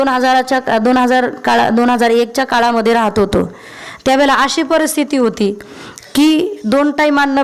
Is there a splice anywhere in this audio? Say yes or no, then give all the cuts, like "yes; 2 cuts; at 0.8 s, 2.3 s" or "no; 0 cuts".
no; 0 cuts